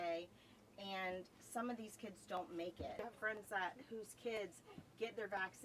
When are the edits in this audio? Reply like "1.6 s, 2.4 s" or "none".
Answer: 3.0 s